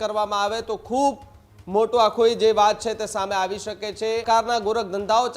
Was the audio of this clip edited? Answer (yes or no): yes